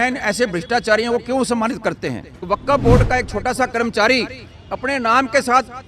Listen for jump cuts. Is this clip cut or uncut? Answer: cut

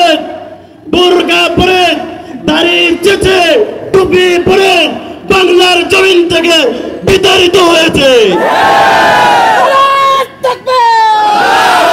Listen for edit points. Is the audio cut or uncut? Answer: uncut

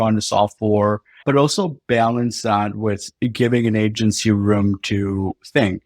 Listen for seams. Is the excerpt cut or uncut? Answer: cut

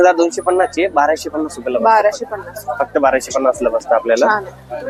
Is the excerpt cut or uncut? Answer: uncut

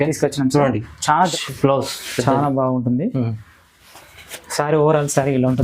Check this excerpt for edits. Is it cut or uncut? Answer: cut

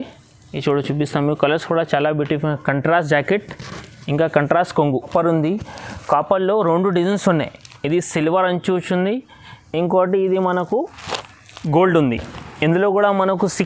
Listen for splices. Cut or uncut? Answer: cut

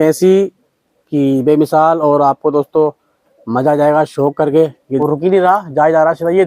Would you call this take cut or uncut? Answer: cut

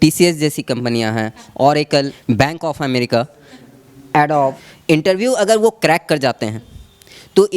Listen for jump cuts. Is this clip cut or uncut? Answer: cut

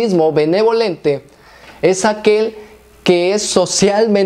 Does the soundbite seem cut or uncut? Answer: uncut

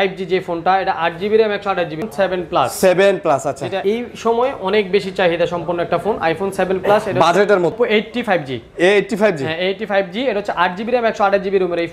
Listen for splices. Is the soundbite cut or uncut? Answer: cut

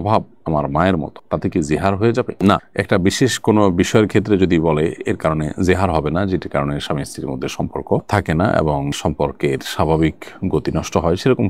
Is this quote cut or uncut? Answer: uncut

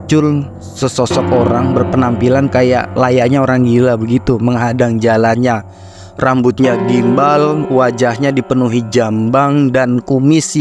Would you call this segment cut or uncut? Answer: uncut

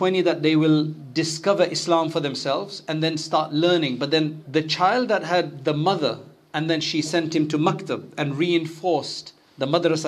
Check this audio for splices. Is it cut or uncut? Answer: cut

